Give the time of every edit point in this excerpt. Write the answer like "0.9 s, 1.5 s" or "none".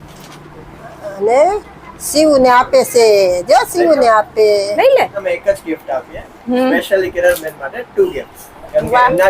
5.2 s